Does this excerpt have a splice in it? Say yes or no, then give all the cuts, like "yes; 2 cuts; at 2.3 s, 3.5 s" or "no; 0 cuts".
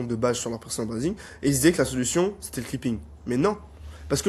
no; 0 cuts